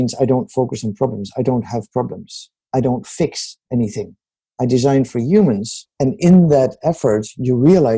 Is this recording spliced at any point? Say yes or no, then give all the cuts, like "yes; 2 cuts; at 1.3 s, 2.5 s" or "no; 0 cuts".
no; 0 cuts